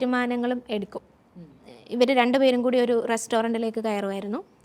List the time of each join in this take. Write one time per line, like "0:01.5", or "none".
0:01.6